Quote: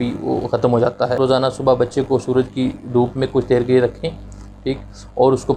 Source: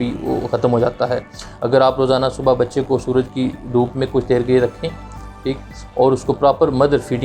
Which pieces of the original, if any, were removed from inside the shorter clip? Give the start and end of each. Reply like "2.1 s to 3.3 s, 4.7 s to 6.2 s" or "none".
1.2 s to 2.0 s